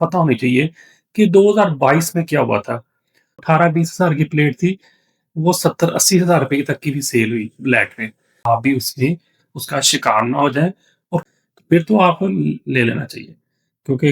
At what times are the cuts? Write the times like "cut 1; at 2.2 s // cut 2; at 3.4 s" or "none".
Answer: cut 1; at 3.4 s // cut 2; at 8.4 s // cut 3; at 11.2 s